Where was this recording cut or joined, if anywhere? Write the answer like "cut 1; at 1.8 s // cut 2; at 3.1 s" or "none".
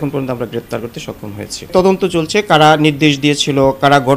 cut 1; at 1.7 s